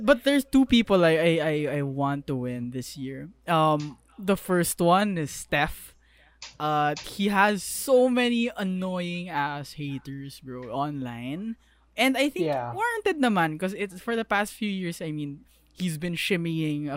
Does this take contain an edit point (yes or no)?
no